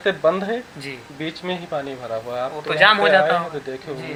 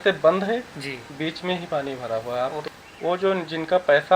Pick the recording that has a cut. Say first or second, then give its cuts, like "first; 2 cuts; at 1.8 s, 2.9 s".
second; 1 cut; at 2.6 s